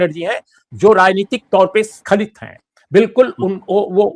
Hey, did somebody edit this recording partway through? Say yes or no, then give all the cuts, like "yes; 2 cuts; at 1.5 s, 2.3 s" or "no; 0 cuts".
no; 0 cuts